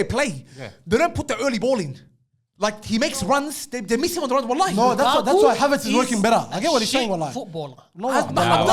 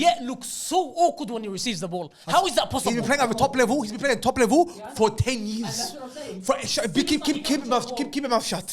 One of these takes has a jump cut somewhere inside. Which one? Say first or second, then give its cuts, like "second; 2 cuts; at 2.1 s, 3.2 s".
second; 1 cut; at 3.4 s